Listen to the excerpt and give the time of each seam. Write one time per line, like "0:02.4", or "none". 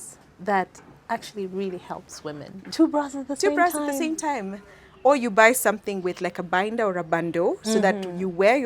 0:02.6